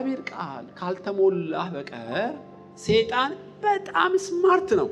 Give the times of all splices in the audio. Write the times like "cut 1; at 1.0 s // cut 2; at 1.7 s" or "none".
none